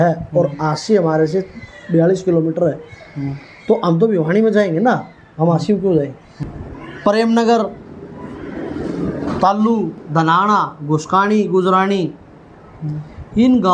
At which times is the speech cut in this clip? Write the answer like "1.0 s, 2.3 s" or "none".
6.4 s